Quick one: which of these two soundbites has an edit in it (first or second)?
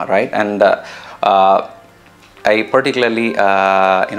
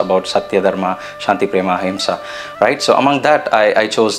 first